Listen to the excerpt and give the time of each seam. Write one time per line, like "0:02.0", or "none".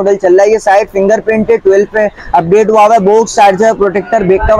none